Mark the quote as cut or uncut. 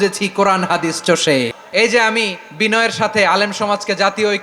cut